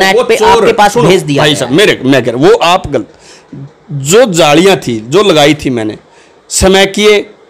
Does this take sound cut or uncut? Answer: uncut